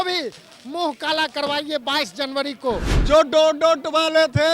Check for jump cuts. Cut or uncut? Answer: cut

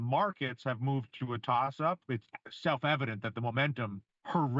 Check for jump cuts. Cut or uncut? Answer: uncut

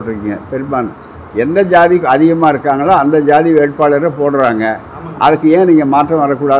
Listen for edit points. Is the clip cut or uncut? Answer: uncut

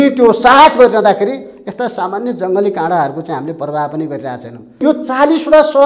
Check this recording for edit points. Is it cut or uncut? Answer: cut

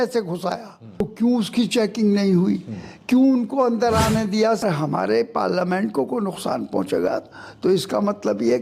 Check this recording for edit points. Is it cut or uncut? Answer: cut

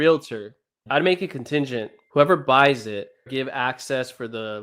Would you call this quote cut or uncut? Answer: cut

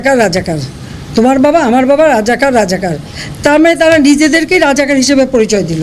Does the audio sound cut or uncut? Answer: uncut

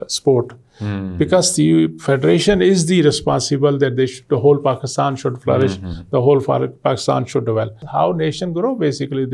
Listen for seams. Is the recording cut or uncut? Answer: cut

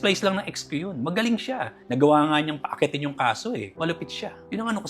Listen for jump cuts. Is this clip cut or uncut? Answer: cut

